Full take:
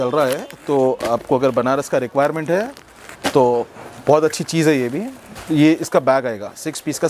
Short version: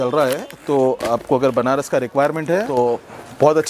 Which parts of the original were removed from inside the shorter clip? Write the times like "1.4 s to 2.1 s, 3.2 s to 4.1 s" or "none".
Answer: 2.8 s to 3.4 s